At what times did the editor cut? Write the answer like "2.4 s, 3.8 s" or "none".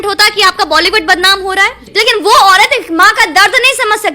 1.8 s